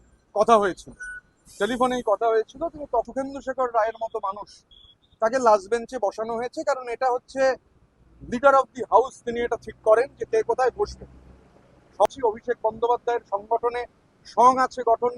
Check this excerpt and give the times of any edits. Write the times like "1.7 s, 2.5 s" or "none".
3.0 s, 12.1 s

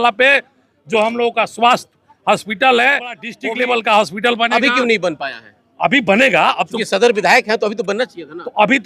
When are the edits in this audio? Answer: 3.3 s

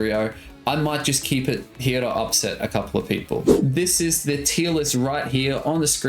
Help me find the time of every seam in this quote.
3.5 s

